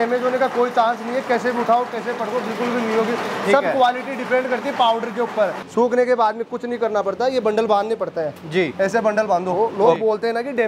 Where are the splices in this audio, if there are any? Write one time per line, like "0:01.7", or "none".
0:05.6
0:09.5